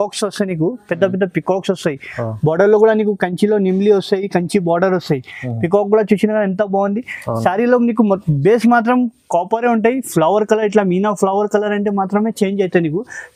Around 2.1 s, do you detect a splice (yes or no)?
no